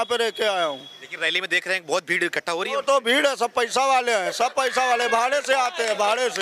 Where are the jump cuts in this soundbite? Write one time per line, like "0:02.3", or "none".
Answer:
none